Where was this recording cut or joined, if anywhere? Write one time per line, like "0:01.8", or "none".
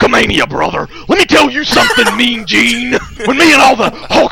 0:03.1

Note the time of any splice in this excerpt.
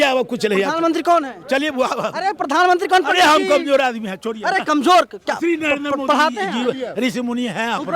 none

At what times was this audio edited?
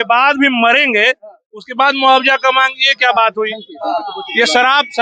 none

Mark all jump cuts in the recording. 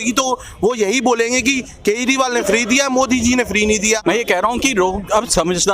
0:03.9

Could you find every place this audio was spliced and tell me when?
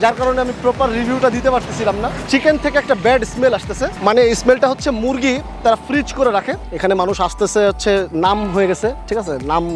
0:02.2
0:06.6

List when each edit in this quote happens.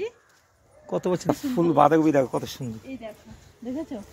0:01.3

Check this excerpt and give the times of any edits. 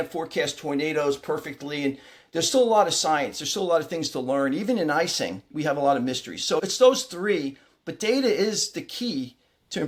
none

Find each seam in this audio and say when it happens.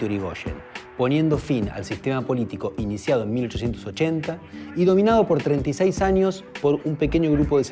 none

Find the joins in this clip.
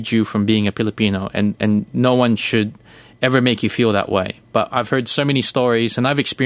none

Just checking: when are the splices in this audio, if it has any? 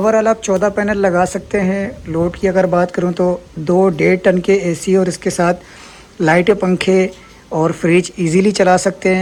none

